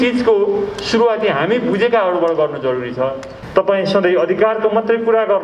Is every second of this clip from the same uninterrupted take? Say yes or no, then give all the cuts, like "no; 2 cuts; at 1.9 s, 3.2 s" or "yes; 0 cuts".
no; 1 cut; at 3.3 s